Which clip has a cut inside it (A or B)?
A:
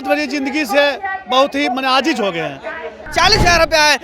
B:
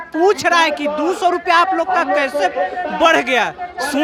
A